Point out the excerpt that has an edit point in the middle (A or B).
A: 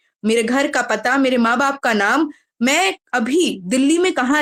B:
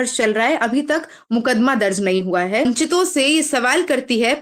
B